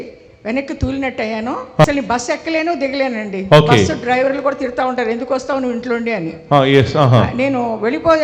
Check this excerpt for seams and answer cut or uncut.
cut